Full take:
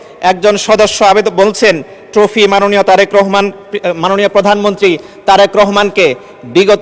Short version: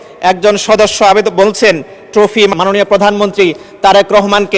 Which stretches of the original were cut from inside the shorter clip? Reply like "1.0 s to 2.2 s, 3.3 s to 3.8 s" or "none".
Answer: 2.5 s to 4.0 s